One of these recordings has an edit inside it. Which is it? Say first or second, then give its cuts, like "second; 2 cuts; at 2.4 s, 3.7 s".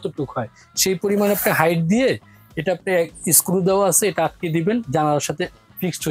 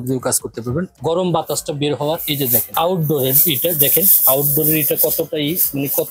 second; 2 cuts; at 0.9 s, 2.7 s